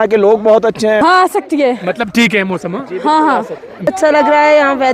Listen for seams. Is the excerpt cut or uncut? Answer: cut